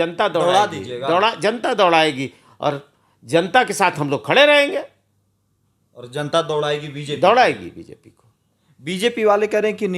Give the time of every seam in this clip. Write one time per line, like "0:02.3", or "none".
none

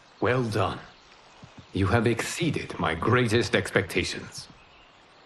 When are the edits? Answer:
none

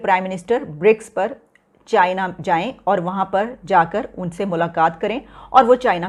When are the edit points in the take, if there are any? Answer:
none

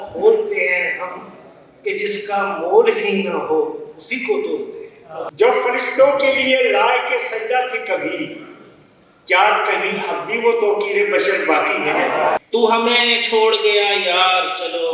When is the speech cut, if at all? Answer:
0:05.3
0:12.4

